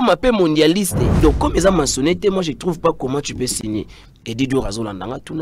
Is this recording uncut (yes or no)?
no